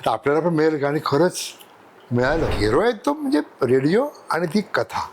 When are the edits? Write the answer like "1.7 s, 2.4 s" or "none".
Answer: 2.5 s